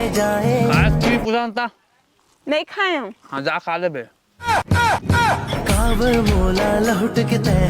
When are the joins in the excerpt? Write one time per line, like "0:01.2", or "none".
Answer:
0:05.5